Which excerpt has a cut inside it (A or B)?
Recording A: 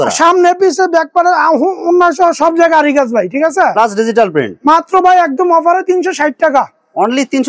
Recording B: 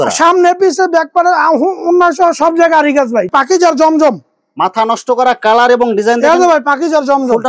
B